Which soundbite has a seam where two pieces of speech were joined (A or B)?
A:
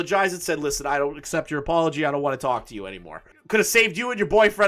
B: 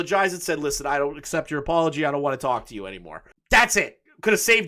A